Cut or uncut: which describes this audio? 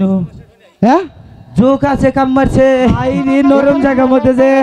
cut